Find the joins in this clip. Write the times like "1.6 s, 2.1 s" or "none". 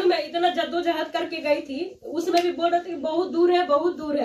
none